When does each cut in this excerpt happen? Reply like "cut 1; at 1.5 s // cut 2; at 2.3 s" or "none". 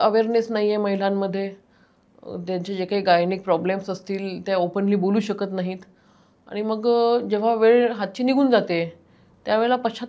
none